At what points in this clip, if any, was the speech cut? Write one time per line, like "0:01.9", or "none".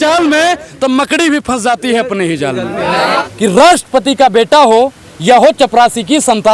0:03.1